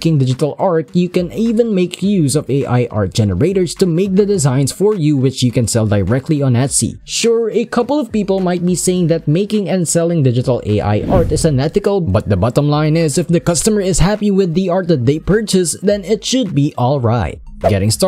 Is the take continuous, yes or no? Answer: yes